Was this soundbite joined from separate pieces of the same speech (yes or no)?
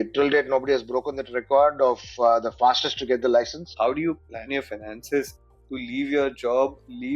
yes